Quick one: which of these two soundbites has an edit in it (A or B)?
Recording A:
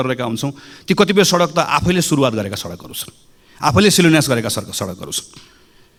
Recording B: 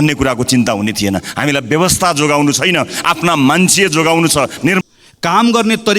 B